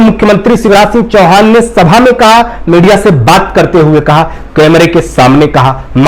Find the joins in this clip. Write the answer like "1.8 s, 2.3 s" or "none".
none